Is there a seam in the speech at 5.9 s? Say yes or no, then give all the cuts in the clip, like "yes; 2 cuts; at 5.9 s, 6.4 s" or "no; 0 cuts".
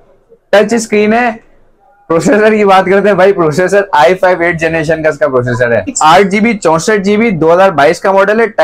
yes; 1 cut; at 5.9 s